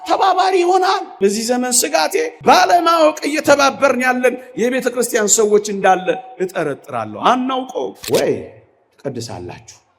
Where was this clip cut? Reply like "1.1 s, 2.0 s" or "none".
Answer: 1.1 s, 2.3 s, 8.0 s